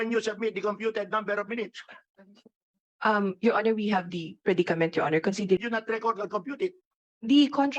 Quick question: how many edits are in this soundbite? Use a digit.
1